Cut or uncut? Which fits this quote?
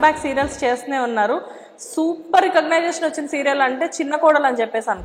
uncut